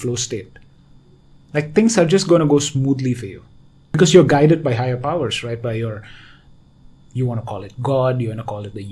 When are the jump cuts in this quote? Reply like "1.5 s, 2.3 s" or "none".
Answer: 4.0 s